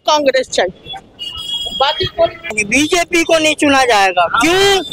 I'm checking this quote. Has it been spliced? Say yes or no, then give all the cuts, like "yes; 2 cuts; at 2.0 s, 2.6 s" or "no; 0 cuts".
yes; 1 cut; at 2.6 s